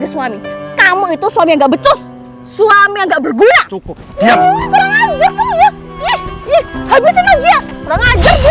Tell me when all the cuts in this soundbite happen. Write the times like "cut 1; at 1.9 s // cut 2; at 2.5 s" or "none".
none